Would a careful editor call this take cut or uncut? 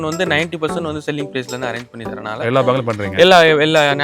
uncut